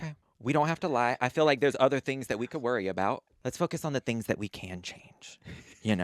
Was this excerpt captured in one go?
no; 1 cut; at 3.3 s

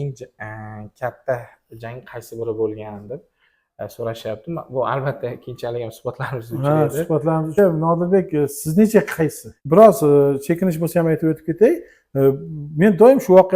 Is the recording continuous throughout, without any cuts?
no; 2 cuts; at 7.5 s, 9.5 s

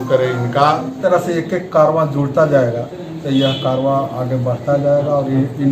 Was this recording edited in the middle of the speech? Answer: yes; 1 cut; at 1.0 s

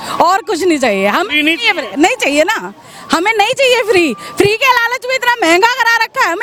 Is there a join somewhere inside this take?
no; 0 cuts

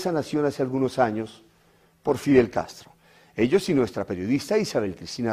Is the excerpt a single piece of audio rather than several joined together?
yes; 0 cuts

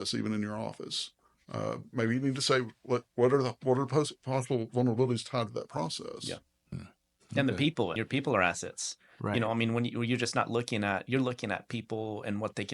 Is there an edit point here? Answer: yes; 2 cuts; at 6.7 s, 7.9 s

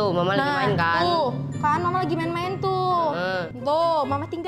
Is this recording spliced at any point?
yes; 1 cut; at 3.5 s

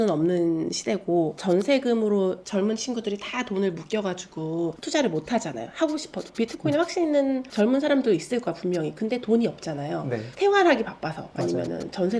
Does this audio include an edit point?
no; 0 cuts

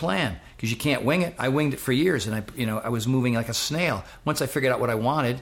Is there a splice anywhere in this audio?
no; 0 cuts

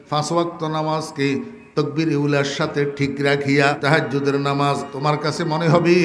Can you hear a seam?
yes; 2 cuts; at 3.8 s, 4.9 s

